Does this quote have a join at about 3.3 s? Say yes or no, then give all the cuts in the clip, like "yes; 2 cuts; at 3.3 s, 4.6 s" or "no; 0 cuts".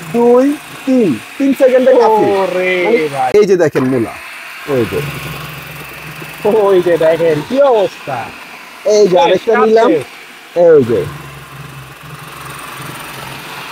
yes; 1 cut; at 3.3 s